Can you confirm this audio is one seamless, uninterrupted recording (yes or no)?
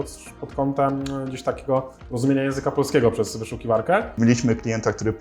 no